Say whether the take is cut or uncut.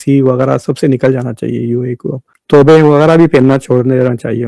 cut